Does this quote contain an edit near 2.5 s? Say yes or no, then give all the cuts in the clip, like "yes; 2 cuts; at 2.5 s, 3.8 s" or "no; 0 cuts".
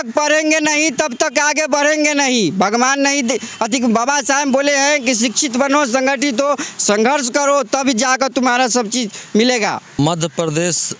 no; 0 cuts